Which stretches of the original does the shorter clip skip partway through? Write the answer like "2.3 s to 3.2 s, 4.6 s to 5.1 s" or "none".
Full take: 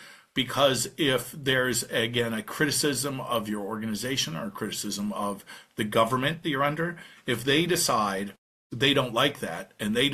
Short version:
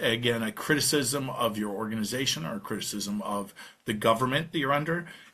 none